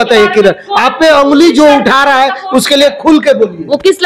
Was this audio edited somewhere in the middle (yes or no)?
no